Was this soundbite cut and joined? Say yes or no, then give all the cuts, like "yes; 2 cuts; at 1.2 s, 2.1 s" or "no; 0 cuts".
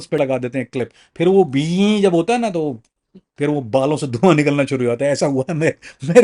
no; 0 cuts